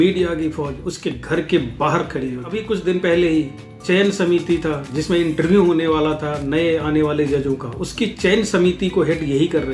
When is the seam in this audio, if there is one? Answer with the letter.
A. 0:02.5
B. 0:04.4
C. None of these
A